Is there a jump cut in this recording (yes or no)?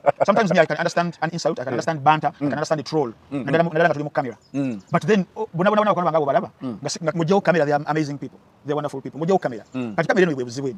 no